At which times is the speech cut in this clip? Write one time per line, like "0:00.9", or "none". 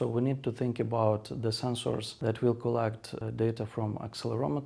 0:02.1
0:03.2